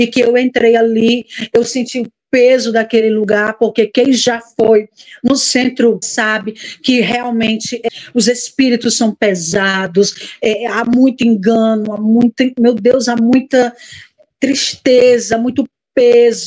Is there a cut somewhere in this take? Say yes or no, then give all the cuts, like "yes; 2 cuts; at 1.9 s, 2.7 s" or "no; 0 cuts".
yes; 2 cuts; at 6.1 s, 7.8 s